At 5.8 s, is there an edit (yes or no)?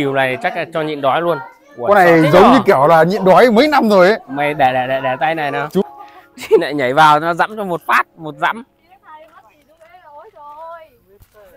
yes